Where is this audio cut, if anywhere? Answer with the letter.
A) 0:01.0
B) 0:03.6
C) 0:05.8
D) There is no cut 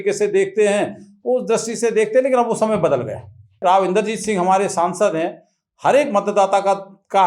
B